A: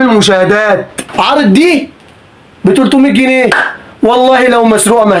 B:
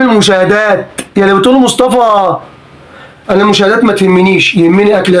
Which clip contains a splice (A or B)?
A